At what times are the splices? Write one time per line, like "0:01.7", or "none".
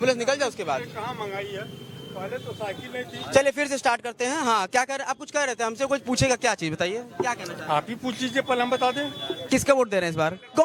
none